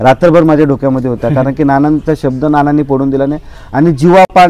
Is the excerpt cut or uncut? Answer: uncut